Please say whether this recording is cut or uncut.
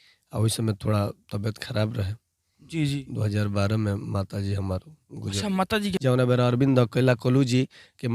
cut